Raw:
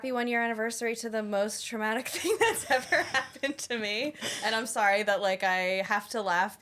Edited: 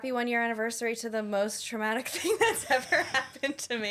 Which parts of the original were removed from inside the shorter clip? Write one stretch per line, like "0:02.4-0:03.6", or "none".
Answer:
none